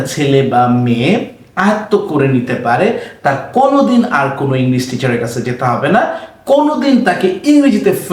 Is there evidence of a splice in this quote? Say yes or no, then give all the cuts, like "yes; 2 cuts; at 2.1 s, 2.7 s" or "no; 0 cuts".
no; 0 cuts